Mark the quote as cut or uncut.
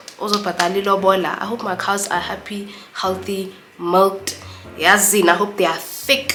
uncut